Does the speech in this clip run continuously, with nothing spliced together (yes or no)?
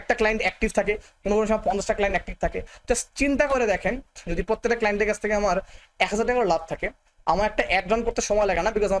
yes